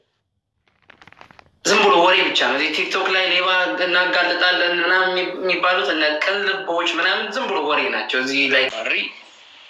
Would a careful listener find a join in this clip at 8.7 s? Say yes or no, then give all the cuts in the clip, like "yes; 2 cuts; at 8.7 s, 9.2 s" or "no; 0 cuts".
yes; 1 cut; at 8.7 s